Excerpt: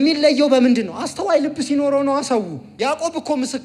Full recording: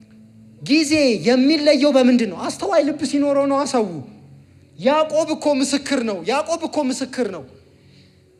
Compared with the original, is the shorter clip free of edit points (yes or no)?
no